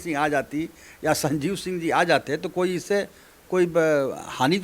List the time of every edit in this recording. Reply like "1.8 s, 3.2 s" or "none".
none